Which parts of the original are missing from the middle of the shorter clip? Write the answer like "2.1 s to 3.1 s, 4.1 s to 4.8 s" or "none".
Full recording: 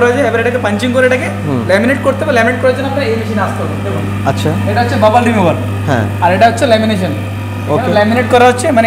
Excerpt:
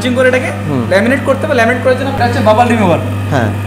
2.9 s to 4.7 s